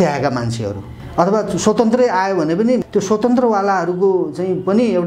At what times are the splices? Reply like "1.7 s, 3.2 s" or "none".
1.0 s, 2.8 s